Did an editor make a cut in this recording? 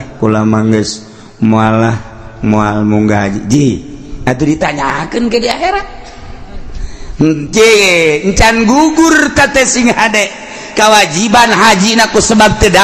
no; 0 cuts

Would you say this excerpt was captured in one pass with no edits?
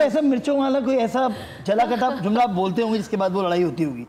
yes; 0 cuts

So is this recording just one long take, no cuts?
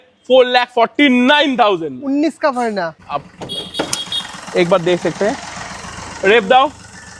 no; 1 cut; at 3.0 s

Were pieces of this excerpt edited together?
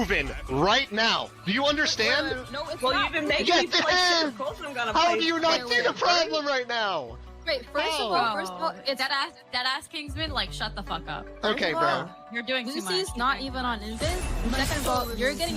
yes; 1 cut; at 1.4 s

